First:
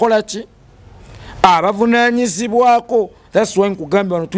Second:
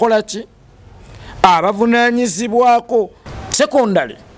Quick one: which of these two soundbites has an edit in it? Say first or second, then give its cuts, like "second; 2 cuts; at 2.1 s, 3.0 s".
second; 1 cut; at 3.2 s